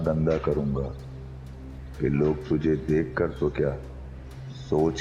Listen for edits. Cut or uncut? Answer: uncut